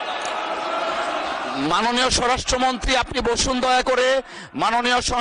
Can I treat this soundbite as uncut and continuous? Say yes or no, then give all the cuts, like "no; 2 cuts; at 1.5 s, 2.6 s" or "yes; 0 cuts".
yes; 0 cuts